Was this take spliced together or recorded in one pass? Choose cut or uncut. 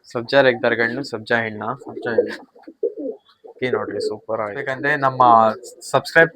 cut